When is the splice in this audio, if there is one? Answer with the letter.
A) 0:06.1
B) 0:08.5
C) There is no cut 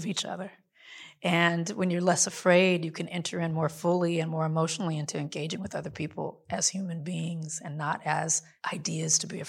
B